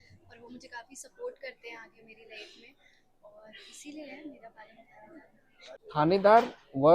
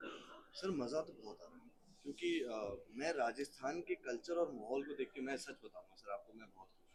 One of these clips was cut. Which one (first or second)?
first